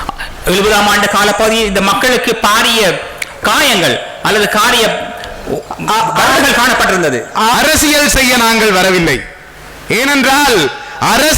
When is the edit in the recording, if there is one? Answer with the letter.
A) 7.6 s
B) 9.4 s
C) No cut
A